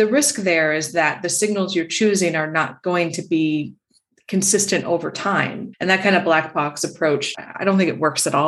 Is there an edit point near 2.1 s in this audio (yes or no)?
no